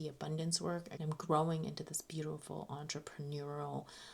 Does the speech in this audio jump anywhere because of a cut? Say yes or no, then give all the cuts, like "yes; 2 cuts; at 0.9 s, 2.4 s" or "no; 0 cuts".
yes; 1 cut; at 0.9 s